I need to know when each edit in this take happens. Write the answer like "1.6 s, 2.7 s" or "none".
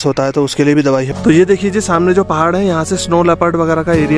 1.1 s